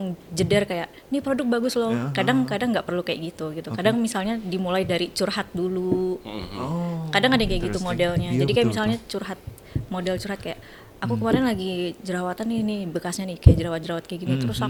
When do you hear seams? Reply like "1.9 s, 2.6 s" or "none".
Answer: none